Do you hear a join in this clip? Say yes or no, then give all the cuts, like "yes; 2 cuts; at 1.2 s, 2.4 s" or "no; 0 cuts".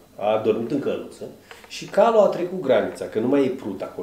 no; 0 cuts